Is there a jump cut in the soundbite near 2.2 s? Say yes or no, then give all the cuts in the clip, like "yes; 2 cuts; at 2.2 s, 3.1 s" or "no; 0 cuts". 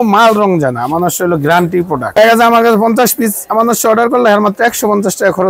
yes; 1 cut; at 2.2 s